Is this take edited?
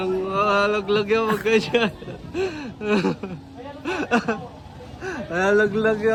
no; 0 cuts

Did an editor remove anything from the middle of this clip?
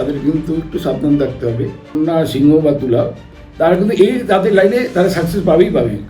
yes; 1 cut; at 2.0 s

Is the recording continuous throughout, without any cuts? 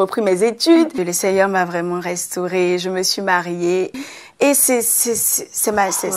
no; 2 cuts; at 0.9 s, 3.9 s

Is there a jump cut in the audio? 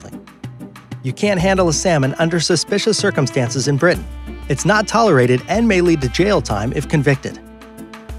no; 0 cuts

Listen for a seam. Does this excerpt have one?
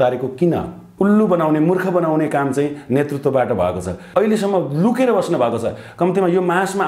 yes; 2 cuts; at 0.9 s, 4.0 s

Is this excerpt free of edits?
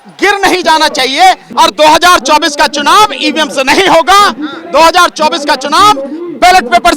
no; 1 cut; at 1.5 s

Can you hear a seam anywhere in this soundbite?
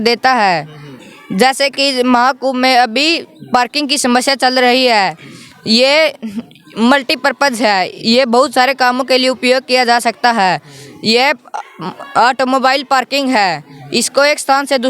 no; 0 cuts

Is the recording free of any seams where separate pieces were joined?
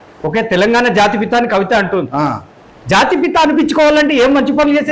yes; 0 cuts

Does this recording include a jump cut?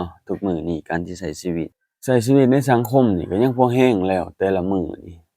yes; 1 cut; at 1.9 s

